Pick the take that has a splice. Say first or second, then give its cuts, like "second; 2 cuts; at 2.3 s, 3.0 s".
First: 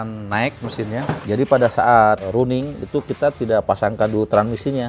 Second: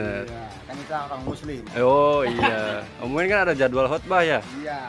first; 2 cuts; at 1.2 s, 2.2 s